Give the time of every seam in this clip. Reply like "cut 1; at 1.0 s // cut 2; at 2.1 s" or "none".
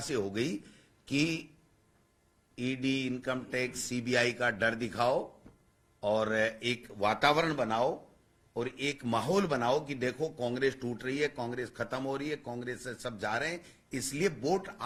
none